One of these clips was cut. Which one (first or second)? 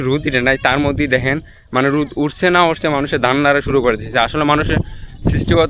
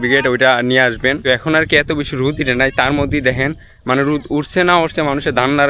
second